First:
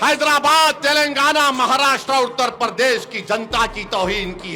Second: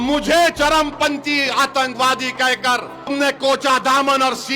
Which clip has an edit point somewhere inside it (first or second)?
second